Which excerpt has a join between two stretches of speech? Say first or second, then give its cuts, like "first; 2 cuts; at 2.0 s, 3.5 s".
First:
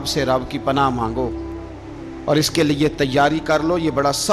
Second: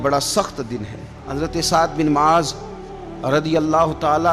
second; 1 cut; at 1.3 s